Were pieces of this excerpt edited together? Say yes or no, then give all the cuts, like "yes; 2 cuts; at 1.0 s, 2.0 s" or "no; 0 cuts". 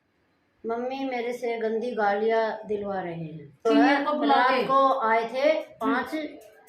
yes; 1 cut; at 3.7 s